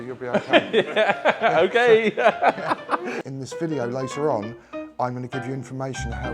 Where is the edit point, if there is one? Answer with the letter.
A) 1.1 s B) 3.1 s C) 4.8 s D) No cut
B